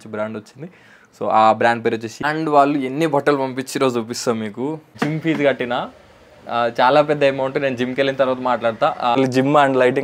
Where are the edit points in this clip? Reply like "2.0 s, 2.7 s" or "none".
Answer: 2.2 s, 4.9 s, 9.2 s